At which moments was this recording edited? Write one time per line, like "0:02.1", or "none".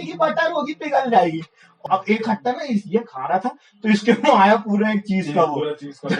0:01.8